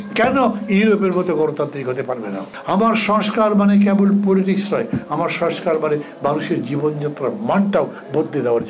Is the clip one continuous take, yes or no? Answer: no